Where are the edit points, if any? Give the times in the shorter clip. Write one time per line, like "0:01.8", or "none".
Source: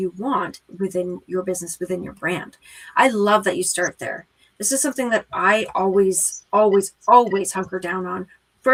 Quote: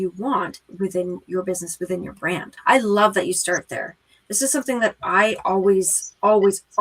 0:02.5